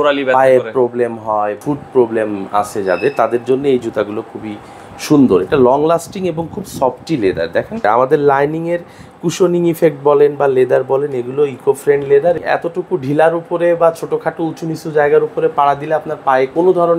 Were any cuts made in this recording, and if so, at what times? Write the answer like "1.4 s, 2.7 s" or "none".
1.6 s, 7.8 s, 12.4 s

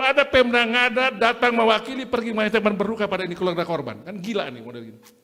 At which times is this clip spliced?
none

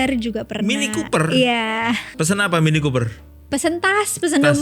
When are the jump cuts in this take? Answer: 2.2 s

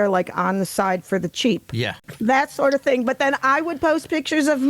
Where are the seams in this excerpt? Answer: 2.0 s

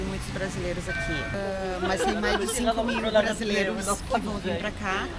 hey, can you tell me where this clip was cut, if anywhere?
1.3 s

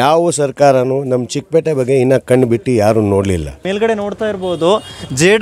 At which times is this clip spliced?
3.6 s

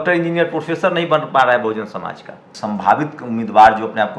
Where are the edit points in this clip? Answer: 2.5 s

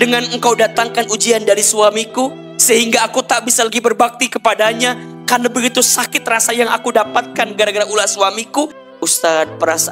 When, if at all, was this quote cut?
8.8 s

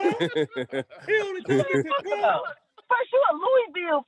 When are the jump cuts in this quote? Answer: 2.7 s

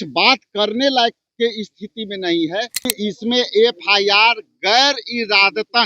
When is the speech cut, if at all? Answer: 2.9 s

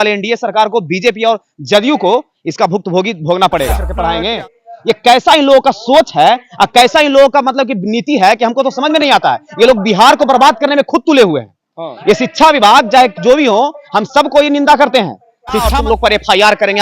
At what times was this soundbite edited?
3.9 s, 15.7 s

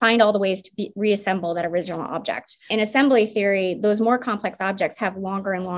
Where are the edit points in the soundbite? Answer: 2.6 s

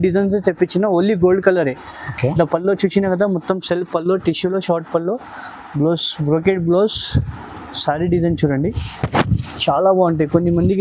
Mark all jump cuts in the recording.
none

